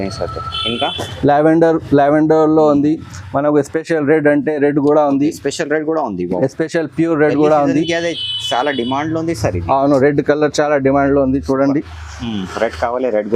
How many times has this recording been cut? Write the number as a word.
zero